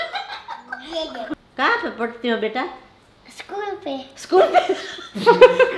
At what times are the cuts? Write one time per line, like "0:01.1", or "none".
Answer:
0:01.3